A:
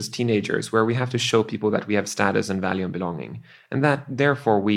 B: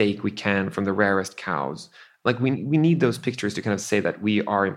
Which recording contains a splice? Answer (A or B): B